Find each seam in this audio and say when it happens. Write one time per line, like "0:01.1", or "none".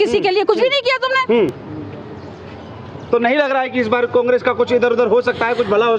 none